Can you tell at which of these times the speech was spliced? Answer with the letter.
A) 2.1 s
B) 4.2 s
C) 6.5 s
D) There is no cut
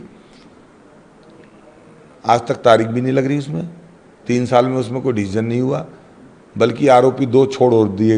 D